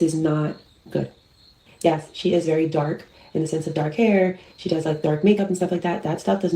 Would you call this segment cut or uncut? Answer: cut